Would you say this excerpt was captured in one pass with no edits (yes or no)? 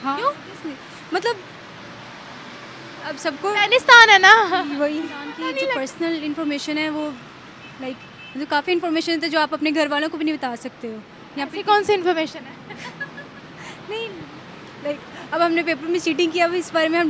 no